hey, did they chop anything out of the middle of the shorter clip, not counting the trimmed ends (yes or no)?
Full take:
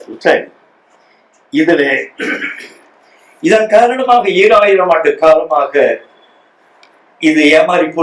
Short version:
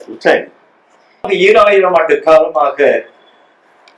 yes